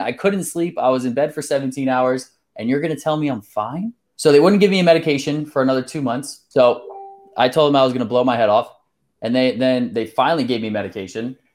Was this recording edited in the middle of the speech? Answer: yes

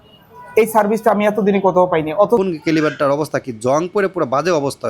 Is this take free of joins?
no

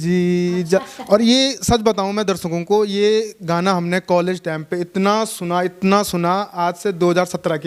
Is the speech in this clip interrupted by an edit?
no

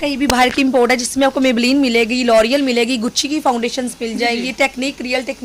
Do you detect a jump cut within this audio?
no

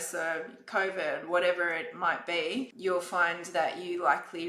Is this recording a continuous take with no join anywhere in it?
no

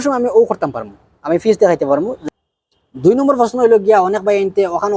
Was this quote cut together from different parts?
yes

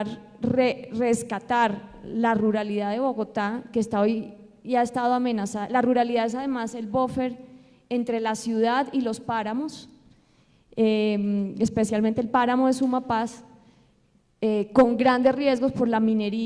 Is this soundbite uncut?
no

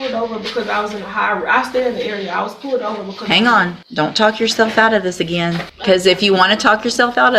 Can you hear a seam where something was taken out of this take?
yes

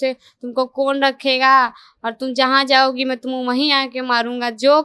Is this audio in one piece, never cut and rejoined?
yes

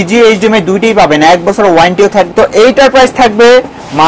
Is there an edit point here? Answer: yes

